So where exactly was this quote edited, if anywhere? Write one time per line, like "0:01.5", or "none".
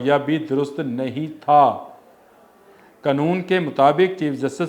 none